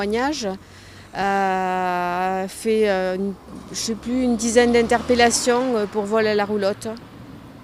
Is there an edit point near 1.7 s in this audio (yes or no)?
yes